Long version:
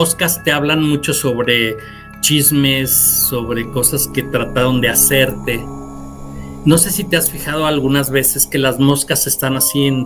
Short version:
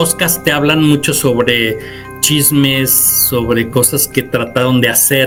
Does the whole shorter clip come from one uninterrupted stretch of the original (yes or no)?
yes